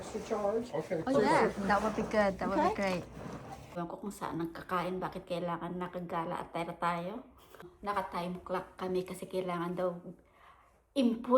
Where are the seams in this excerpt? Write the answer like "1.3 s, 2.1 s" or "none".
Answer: 3.7 s, 7.6 s